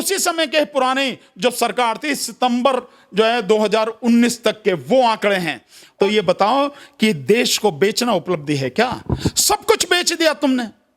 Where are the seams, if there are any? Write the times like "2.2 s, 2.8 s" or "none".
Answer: 5.8 s